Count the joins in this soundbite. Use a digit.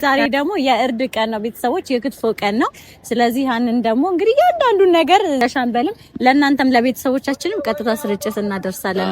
1